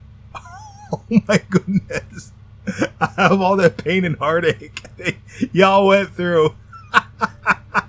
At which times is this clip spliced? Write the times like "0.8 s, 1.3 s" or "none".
none